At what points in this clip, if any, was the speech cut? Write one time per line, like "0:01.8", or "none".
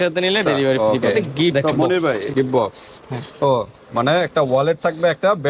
0:02.3